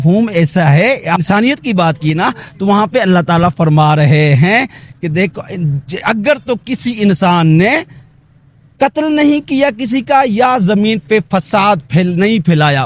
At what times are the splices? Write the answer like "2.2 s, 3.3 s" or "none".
1.2 s